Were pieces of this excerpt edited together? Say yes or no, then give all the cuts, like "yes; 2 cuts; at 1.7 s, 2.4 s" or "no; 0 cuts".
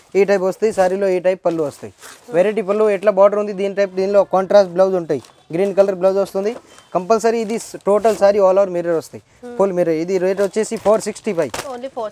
no; 0 cuts